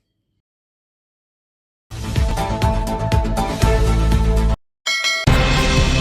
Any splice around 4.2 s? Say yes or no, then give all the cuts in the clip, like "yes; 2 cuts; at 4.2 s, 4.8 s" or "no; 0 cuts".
yes; 2 cuts; at 4.2 s, 5.2 s